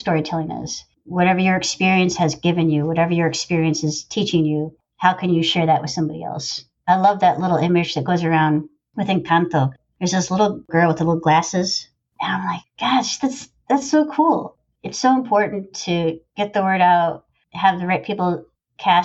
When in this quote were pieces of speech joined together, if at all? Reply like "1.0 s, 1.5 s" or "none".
12.1 s